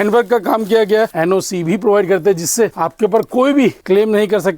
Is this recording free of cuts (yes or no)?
no